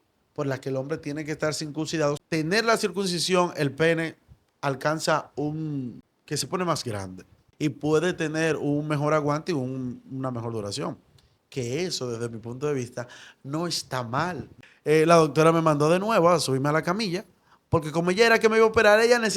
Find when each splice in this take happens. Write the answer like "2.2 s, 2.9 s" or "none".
2.2 s, 6.1 s, 7.5 s, 14.6 s